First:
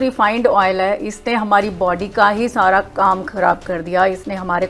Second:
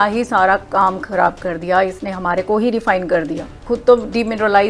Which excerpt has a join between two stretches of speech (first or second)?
second